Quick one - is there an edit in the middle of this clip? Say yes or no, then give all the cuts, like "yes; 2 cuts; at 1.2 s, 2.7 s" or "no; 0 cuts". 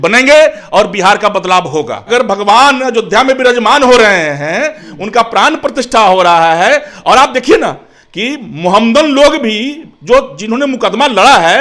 yes; 1 cut; at 2.0 s